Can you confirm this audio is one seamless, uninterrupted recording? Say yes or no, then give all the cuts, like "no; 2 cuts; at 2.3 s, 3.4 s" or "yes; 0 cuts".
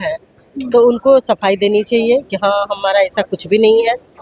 yes; 0 cuts